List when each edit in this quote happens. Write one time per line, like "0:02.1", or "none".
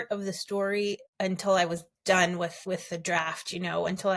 0:01.1
0:02.6